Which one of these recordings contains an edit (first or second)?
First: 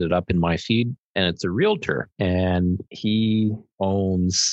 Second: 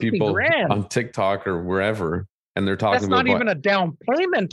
first